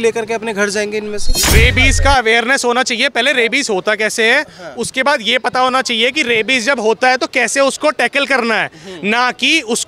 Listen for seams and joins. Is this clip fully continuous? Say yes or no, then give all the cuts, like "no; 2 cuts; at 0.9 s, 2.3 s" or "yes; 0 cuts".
no; 1 cut; at 1.4 s